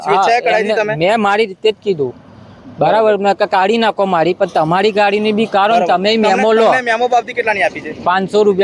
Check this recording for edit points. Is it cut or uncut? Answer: uncut